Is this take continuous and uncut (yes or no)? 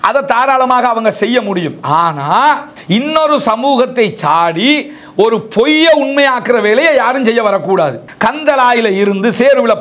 no